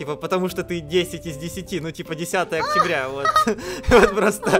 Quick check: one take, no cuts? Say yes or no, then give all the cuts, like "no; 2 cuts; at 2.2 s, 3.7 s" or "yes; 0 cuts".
yes; 0 cuts